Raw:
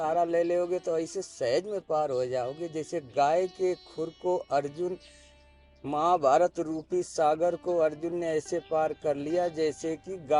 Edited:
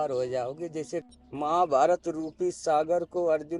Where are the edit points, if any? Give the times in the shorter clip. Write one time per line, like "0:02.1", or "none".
0:01.1